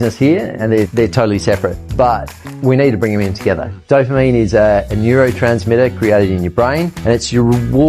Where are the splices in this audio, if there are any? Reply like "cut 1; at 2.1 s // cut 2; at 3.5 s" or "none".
cut 1; at 0.9 s // cut 2; at 1.8 s // cut 3; at 3.7 s // cut 4; at 6.9 s